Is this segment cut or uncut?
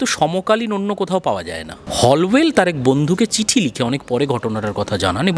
cut